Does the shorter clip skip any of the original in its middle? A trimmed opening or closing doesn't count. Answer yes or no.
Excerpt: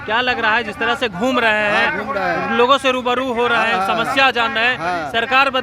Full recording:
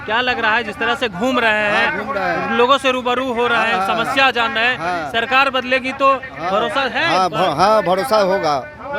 no